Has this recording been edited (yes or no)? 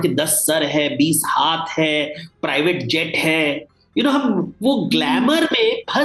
no